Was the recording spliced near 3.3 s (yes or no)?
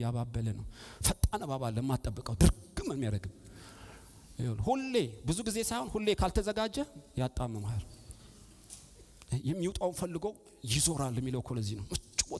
no